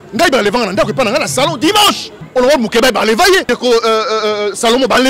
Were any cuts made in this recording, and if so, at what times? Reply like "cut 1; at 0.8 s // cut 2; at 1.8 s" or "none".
cut 1; at 2.1 s // cut 2; at 3.5 s